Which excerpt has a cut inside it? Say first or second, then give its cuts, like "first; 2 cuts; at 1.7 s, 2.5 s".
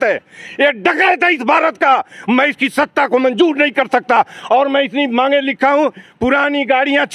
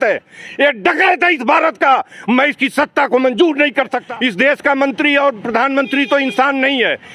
second; 1 cut; at 4.0 s